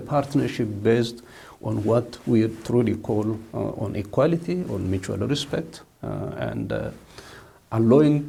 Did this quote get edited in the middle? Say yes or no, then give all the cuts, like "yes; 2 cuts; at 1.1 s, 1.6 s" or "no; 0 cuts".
no; 0 cuts